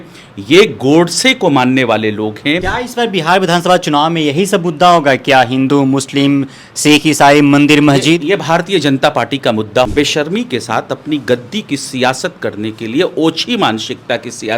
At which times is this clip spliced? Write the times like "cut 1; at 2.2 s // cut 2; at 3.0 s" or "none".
cut 1; at 2.7 s // cut 2; at 9.9 s